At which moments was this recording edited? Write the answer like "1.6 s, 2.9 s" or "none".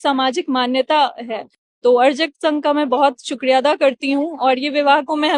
none